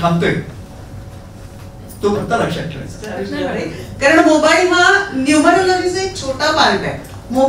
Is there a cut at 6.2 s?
no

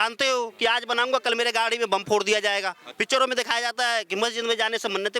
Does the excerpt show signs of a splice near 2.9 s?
yes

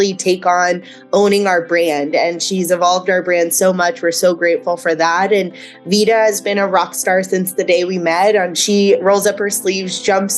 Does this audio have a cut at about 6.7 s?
no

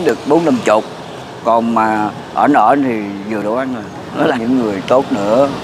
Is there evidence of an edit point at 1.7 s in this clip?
no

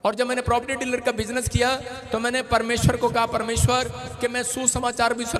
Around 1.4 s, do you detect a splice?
no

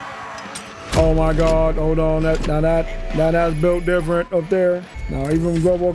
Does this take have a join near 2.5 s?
no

